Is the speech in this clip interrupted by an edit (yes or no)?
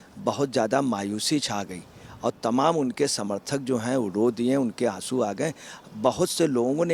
no